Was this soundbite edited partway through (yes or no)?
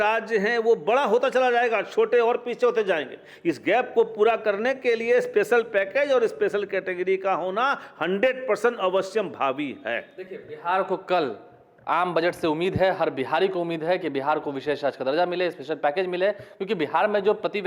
no